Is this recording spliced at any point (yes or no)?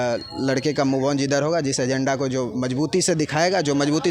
no